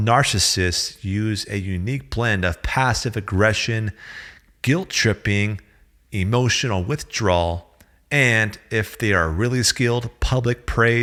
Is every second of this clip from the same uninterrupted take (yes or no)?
yes